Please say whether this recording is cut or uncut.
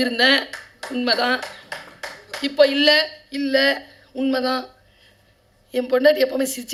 uncut